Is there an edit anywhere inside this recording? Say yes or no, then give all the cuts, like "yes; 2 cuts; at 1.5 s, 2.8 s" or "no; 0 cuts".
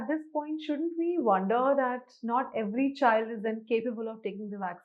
no; 0 cuts